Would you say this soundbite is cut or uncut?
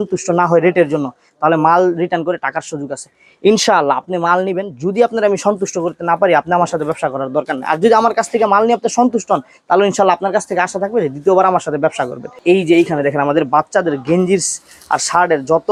uncut